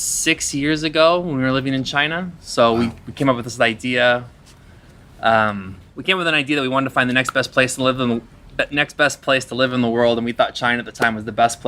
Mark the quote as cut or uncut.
uncut